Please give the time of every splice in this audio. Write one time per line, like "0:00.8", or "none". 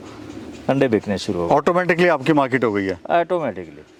none